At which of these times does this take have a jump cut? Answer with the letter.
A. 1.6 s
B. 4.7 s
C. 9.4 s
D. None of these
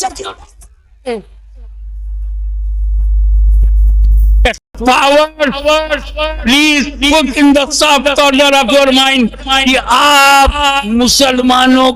B